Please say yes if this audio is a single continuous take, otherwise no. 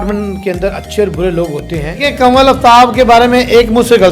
no